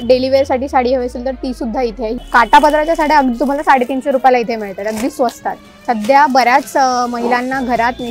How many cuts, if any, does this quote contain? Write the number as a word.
two